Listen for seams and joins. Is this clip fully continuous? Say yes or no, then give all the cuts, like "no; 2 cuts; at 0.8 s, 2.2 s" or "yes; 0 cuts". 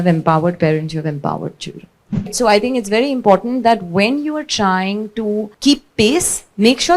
no; 2 cuts; at 2.3 s, 5.5 s